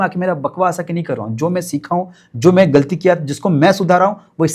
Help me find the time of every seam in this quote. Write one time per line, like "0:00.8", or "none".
none

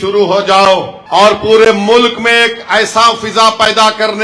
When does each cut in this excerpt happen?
0:00.9

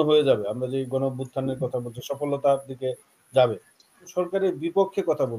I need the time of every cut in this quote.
0:04.1

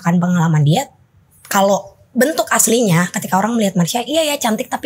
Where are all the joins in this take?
none

